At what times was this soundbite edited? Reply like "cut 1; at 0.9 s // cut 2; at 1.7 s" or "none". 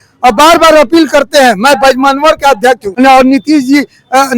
cut 1; at 2.9 s